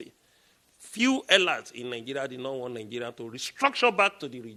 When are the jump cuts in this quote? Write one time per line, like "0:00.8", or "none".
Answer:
none